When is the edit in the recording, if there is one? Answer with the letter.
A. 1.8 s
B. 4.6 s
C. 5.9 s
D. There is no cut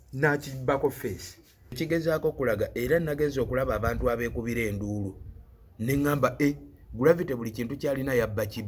A